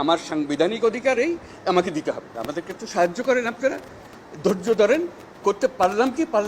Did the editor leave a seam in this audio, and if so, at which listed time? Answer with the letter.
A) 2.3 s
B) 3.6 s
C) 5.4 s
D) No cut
A